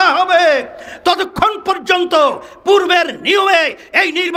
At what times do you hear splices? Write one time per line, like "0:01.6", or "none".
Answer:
none